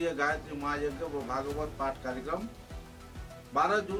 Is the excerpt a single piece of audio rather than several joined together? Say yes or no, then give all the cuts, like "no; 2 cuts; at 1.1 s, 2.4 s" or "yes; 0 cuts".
yes; 0 cuts